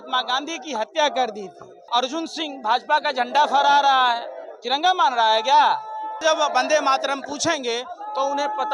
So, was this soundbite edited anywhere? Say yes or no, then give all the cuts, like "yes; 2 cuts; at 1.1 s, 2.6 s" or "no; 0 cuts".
yes; 2 cuts; at 1.7 s, 6.2 s